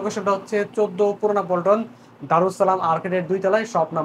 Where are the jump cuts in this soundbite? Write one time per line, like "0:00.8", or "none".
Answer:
none

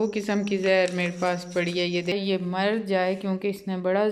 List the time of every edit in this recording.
0:02.1

